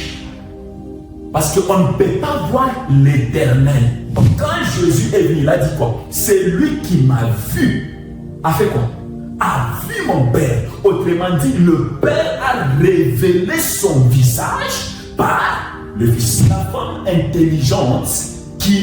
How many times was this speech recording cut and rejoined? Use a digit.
2